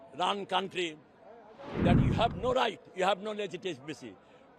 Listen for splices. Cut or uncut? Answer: cut